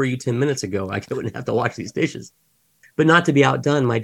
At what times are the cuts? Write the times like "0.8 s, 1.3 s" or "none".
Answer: 2.8 s